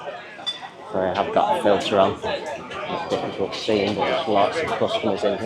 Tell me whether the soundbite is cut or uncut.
uncut